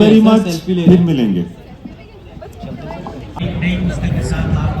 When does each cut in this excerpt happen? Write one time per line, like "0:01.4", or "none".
0:03.4